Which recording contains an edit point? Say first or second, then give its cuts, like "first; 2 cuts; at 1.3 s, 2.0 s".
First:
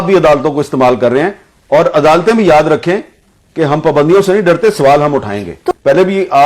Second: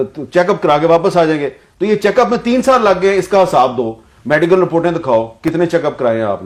first; 1 cut; at 5.5 s